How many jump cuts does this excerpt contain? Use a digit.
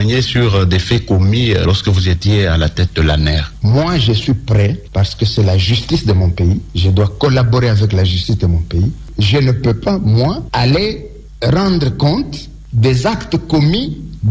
1